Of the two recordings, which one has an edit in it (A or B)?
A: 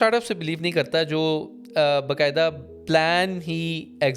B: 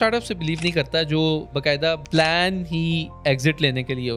B